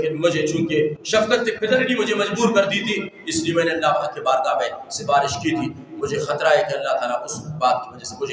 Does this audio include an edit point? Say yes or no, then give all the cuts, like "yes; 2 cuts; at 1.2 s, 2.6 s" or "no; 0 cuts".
no; 0 cuts